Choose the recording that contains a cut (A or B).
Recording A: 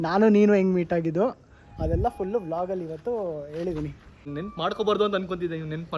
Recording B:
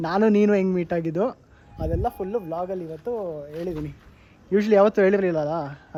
A